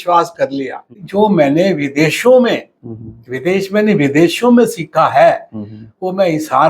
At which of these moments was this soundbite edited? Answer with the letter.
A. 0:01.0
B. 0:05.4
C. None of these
A